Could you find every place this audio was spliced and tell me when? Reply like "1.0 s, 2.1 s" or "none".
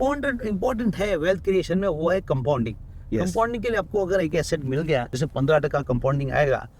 5.2 s